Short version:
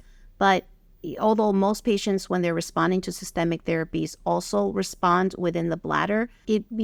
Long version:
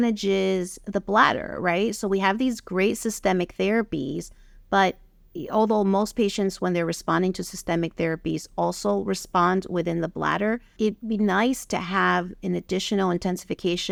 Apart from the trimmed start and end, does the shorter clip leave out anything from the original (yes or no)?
no